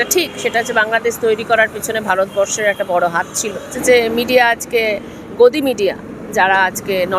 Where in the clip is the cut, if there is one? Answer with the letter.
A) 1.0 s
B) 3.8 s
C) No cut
B